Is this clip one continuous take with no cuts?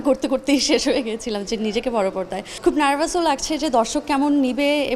no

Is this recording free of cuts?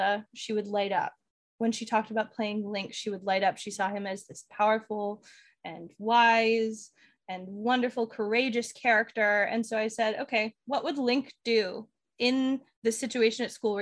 no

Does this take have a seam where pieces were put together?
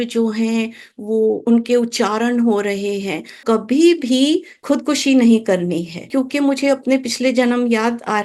yes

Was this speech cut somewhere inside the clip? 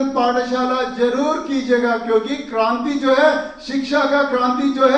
no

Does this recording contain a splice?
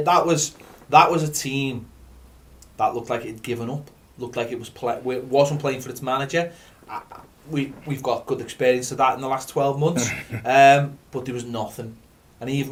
no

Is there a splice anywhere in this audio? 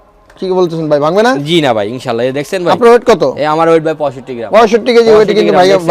no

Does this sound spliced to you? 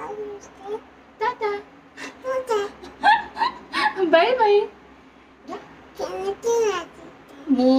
yes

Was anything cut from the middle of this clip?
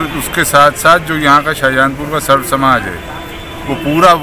no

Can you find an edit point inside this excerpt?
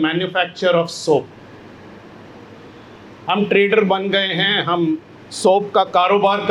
no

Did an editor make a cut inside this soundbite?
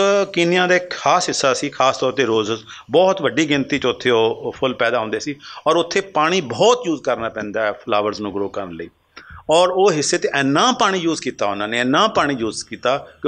no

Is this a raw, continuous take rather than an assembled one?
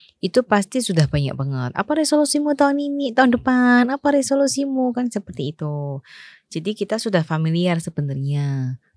yes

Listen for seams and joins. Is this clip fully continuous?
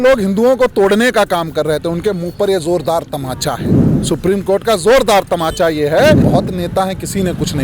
no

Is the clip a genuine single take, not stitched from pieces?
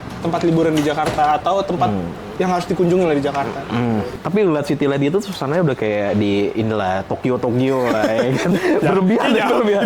no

